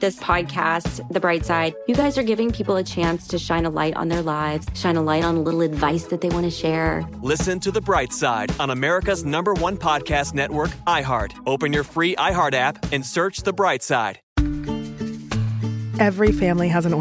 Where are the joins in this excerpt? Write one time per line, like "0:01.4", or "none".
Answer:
0:14.2